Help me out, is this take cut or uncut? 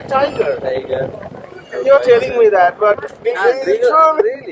uncut